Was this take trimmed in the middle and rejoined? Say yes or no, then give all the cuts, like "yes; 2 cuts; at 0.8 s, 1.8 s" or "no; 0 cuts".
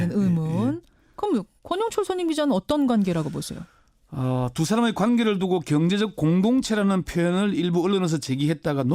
no; 0 cuts